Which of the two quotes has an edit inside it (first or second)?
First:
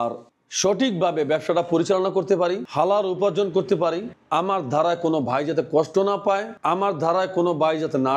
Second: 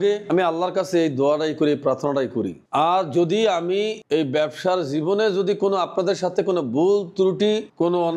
second